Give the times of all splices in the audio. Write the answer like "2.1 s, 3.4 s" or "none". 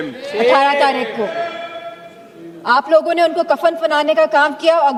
none